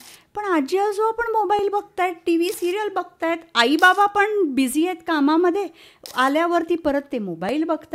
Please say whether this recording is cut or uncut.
uncut